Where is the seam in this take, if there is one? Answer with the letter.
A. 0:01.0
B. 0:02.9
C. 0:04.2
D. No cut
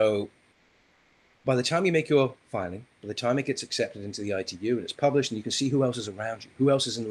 D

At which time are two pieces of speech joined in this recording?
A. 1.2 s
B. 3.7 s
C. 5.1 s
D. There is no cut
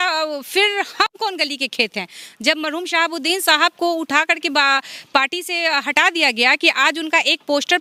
D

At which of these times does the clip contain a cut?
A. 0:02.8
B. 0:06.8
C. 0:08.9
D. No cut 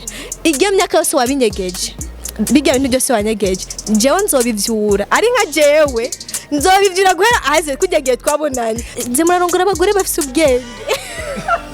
C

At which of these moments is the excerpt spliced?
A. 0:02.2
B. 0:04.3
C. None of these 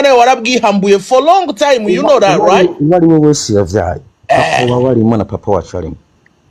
C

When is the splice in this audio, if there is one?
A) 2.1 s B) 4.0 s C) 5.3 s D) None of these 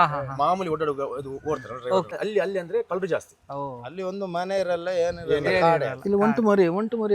A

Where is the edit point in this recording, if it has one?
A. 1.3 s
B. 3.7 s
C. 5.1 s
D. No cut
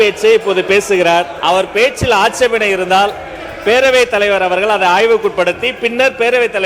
A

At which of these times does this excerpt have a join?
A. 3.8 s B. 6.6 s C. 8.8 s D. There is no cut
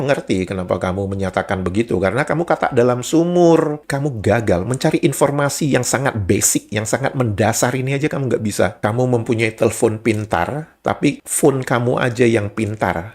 A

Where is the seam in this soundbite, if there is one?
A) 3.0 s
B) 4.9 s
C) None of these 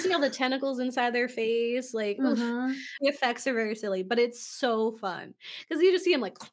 A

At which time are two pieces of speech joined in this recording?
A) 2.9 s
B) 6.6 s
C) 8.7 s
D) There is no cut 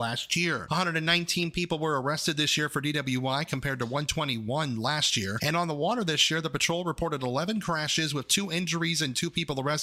D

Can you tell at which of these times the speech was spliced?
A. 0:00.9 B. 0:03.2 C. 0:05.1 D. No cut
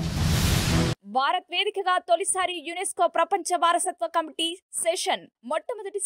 A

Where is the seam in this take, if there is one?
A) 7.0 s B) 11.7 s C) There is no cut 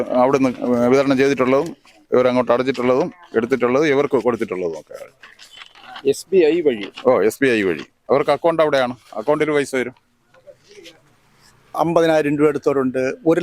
B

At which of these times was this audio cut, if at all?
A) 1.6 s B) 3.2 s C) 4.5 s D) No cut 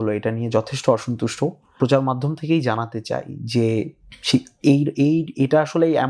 A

